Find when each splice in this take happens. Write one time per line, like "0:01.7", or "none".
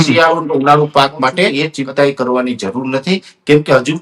0:01.5

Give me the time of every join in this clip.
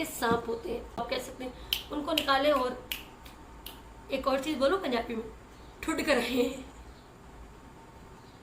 0:01.0

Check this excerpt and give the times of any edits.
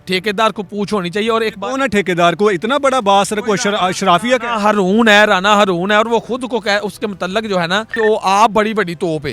0:07.9

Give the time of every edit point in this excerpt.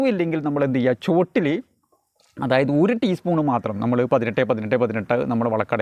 none

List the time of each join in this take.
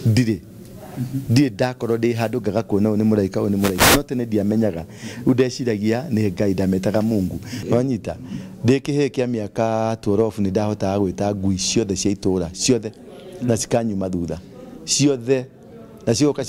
0:07.5

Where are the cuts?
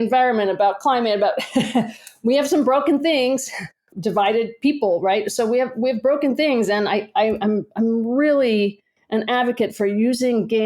0:03.9

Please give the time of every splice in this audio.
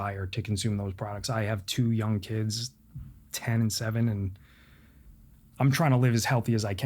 0:05.4

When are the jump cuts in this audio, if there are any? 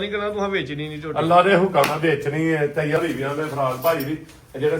0:03.0

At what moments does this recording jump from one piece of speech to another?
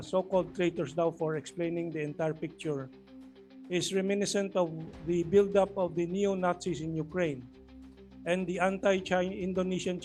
none

